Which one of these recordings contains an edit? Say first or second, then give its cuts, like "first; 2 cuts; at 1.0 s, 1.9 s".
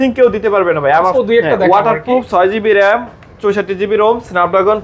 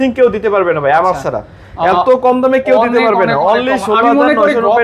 first; 1 cut; at 1.1 s